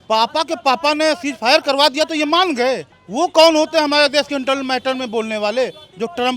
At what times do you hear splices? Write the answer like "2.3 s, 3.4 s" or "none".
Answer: 3.0 s